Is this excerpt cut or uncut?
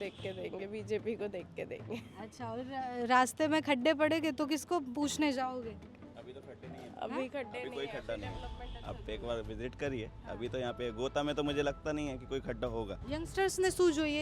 cut